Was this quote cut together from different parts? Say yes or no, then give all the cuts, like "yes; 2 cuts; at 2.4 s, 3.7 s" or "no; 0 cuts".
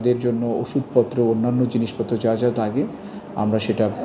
no; 0 cuts